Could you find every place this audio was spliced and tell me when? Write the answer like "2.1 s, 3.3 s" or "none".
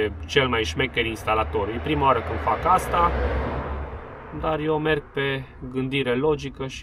none